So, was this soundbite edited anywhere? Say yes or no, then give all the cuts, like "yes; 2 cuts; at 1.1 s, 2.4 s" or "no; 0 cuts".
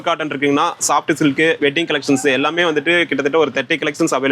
no; 0 cuts